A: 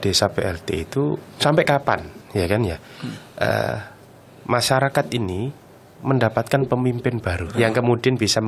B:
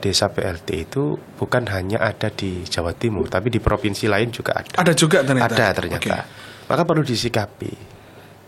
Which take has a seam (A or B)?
A